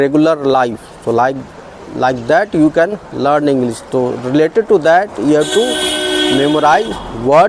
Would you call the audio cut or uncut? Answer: uncut